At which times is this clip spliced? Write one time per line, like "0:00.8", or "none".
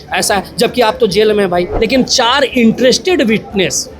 0:01.7